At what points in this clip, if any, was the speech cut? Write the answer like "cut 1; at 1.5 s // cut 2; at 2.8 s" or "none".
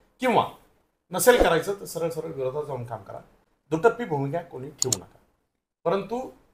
none